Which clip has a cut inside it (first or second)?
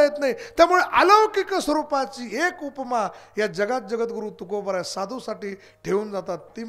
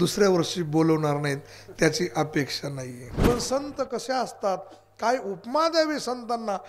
second